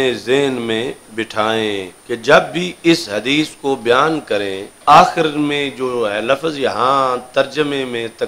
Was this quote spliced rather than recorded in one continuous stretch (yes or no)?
yes